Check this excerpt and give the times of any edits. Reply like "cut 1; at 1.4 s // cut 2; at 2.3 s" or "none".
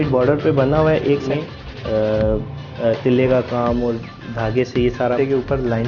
cut 1; at 1.2 s // cut 2; at 2.6 s // cut 3; at 5.2 s

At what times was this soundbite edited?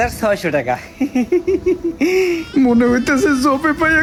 none

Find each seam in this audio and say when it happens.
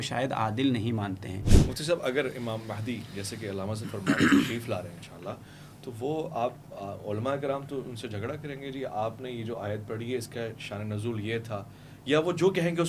cut 1; at 1.5 s

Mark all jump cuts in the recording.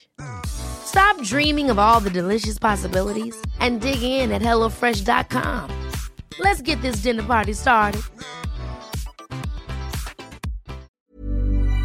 cut 1; at 10.9 s

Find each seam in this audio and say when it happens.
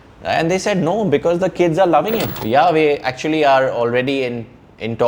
cut 1; at 2.3 s

